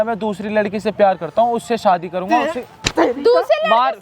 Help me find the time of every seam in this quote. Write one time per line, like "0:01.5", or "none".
none